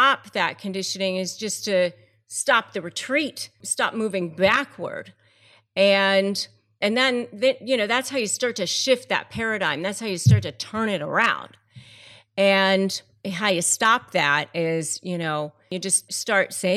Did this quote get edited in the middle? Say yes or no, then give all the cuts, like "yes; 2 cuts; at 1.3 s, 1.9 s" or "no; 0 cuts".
no; 0 cuts